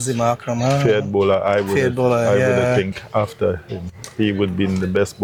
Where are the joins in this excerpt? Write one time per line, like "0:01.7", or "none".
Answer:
none